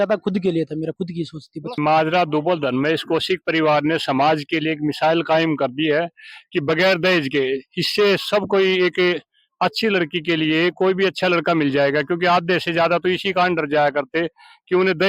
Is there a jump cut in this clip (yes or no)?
yes